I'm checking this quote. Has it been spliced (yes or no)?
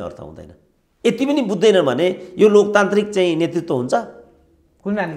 no